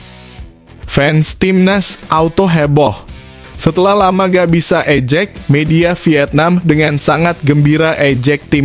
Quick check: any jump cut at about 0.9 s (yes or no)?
yes